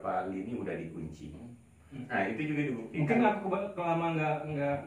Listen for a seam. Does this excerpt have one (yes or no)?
yes